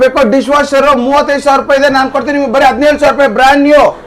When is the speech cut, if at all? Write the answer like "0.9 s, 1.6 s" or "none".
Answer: none